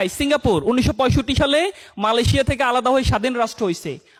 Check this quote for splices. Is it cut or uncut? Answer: uncut